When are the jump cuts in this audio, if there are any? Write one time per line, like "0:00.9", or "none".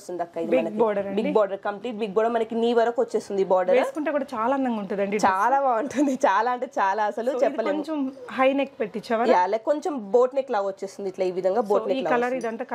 none